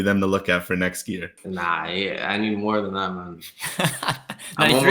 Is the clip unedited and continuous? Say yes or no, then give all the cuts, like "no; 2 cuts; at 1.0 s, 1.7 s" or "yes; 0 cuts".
no; 1 cut; at 1.3 s